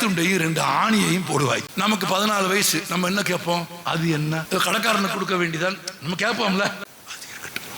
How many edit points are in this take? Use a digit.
3